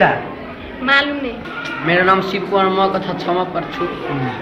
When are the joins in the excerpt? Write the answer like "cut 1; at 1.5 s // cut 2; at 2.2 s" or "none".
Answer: none